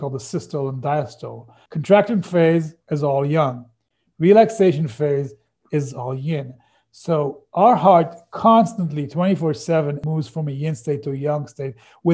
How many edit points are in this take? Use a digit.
2